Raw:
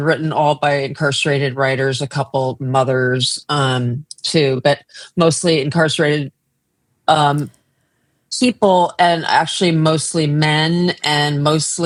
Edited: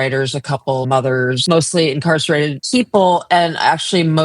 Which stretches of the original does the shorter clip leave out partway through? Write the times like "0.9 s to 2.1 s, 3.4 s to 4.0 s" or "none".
2.7 s to 4.8 s, 6.3 s to 8.3 s